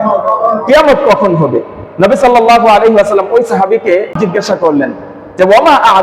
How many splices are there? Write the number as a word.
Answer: one